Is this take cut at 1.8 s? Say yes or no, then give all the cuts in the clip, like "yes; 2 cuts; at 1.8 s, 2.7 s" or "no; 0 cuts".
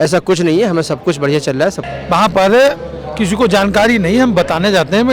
no; 0 cuts